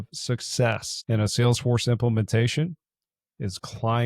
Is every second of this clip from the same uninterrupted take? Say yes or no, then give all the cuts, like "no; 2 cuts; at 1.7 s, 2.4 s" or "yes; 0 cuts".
yes; 0 cuts